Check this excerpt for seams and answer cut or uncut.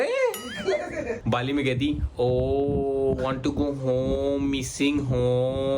cut